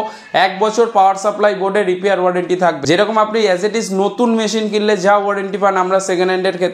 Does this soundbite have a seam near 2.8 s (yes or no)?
yes